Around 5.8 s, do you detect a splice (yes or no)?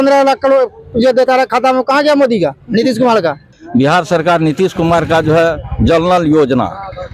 no